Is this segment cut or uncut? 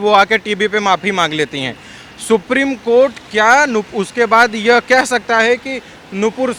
uncut